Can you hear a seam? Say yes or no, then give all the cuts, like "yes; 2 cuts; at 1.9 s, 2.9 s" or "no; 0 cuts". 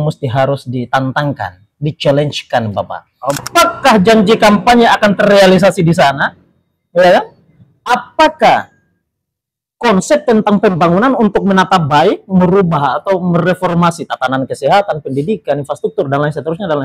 yes; 1 cut; at 3.4 s